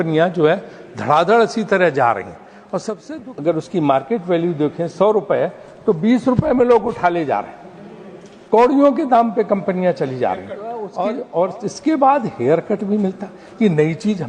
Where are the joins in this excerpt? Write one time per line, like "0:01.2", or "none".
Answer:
0:02.9
0:10.9

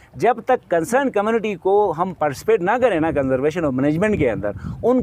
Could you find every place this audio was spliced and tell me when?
none

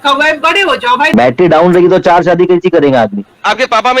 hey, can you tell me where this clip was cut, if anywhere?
0:01.1

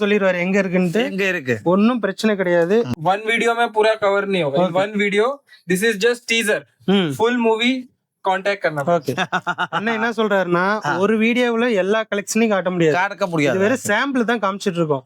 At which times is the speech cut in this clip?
0:02.9

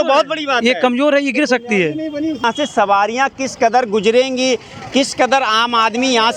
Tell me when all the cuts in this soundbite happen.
0:02.4

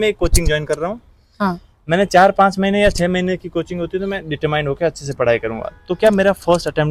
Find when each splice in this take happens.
none

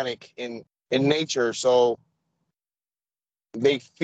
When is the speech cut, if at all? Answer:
none

